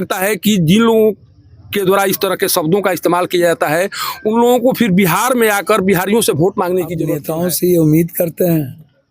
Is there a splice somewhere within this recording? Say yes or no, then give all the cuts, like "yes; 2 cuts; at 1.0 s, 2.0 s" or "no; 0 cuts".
yes; 1 cut; at 7.1 s